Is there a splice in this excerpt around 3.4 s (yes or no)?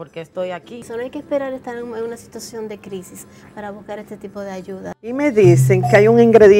no